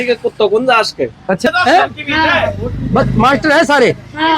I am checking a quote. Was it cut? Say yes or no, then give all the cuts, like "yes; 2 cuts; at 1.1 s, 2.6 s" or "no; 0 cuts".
yes; 1 cut; at 1.5 s